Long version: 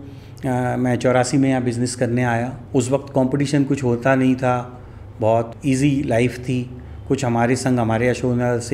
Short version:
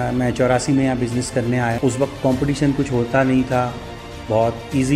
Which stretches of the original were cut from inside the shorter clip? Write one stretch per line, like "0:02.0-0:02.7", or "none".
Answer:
0:02.4-0:02.7